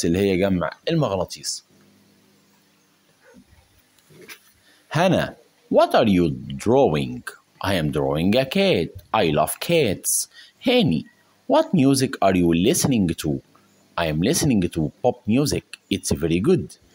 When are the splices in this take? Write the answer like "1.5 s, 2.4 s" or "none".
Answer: 3.0 s